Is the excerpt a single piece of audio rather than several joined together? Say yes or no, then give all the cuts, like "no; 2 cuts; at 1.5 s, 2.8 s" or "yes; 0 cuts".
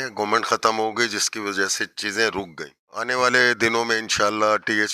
no; 1 cut; at 3.1 s